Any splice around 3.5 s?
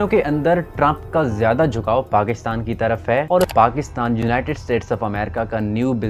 yes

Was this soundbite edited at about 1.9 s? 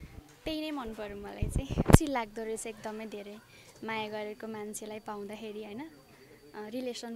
yes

